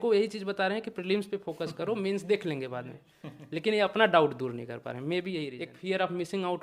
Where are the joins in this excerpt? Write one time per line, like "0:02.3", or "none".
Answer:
0:05.6